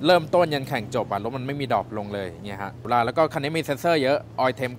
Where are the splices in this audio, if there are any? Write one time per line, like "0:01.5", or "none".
0:02.9